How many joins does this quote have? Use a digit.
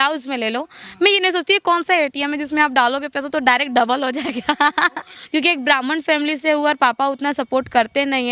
1